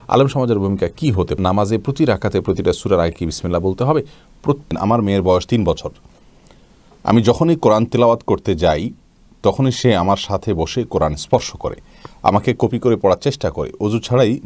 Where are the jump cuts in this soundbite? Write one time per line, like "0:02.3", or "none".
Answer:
0:01.3
0:04.8